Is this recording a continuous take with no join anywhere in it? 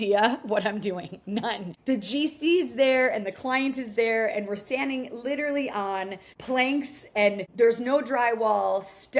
yes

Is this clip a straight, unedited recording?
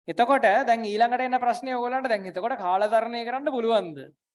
yes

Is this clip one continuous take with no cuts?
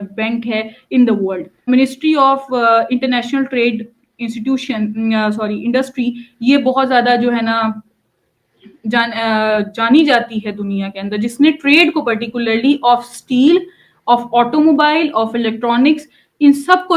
no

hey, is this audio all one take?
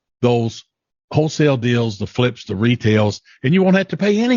yes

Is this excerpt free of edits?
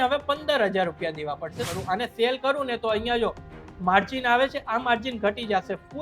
no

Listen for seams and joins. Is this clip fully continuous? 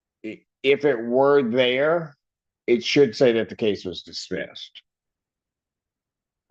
yes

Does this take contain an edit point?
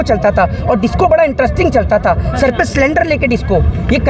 no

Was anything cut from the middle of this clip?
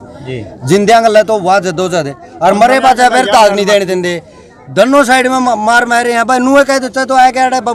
no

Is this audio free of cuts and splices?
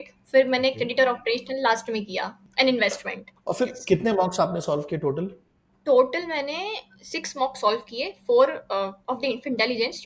no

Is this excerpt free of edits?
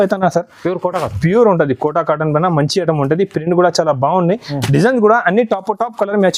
yes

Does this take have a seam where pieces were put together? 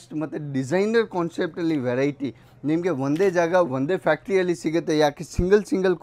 no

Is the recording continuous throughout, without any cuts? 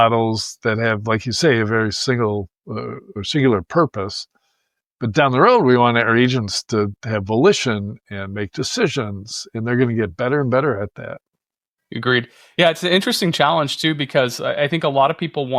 yes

